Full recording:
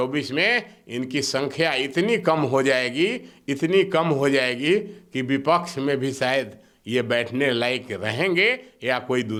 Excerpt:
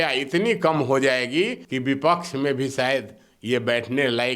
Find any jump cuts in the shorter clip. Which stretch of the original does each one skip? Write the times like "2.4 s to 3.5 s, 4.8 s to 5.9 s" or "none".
3.3 s to 5.1 s